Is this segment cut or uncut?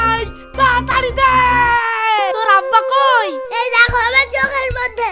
cut